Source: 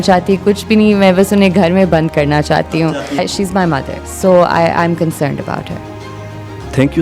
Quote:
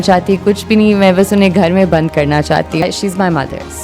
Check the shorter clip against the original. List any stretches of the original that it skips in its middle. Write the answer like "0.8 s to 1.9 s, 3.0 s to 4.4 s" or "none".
2.8 s to 3.2 s